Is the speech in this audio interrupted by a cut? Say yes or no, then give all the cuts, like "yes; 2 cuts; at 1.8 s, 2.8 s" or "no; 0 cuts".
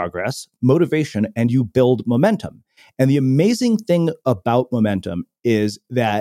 no; 0 cuts